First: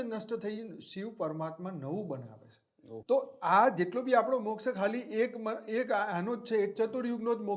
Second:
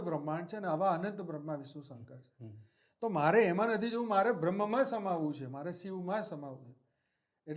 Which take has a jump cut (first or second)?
first